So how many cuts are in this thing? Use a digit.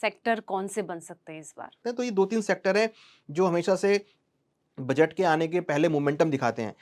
1